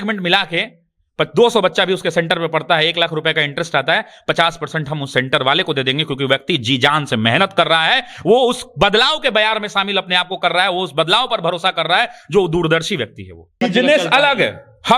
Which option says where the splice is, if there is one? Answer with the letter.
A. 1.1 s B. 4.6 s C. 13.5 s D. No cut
C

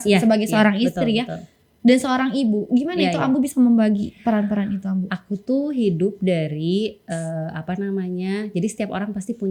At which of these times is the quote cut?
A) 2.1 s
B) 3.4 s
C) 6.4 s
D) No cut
D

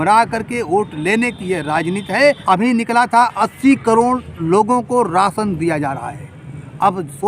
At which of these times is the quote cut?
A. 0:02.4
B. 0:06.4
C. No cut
A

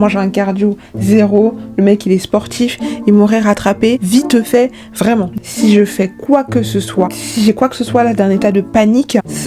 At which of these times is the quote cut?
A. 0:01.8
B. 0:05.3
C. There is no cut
B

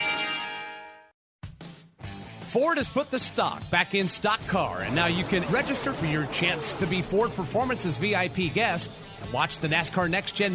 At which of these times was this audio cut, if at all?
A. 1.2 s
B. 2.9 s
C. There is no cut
A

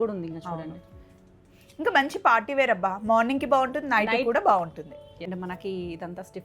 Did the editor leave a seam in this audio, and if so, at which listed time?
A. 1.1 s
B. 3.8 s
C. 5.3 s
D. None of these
C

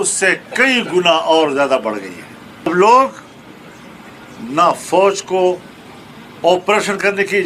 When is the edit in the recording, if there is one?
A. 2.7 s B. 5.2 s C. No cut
A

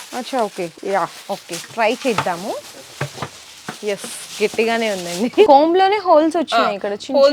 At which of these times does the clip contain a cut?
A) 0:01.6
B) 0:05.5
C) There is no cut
B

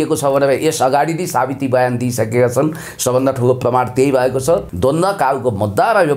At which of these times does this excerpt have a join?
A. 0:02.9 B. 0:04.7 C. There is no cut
B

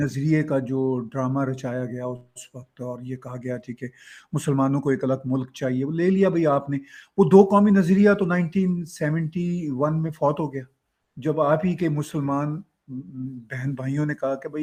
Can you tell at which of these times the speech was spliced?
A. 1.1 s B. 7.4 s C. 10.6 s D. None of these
D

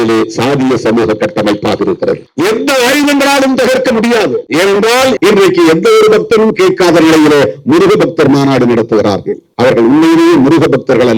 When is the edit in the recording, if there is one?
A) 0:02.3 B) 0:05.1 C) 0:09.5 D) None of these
B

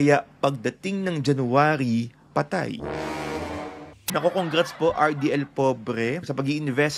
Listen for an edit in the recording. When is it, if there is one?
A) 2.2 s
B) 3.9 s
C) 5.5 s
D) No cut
B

